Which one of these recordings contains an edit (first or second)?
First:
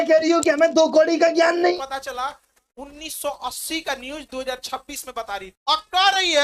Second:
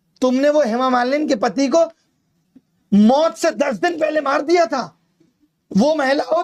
first